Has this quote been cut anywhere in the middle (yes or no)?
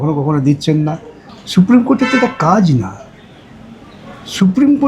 no